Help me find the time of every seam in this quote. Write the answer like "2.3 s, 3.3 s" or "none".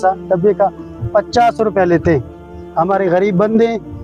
none